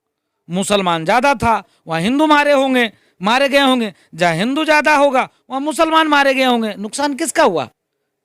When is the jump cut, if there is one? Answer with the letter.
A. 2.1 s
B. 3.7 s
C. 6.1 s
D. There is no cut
D